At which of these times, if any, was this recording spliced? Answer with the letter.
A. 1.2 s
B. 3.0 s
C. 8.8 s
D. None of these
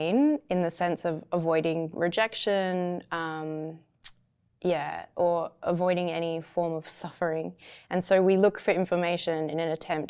D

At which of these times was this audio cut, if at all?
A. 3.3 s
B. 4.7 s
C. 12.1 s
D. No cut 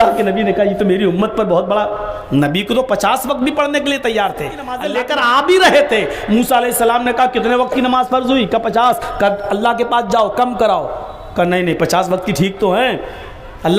B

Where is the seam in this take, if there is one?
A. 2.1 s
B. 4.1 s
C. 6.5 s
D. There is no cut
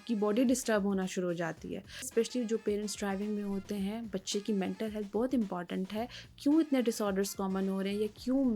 A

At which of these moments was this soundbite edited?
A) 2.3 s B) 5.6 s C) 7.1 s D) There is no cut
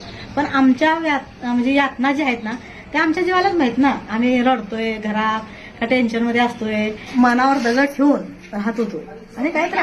C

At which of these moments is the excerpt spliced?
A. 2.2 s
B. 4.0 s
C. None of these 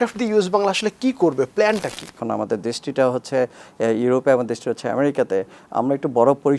A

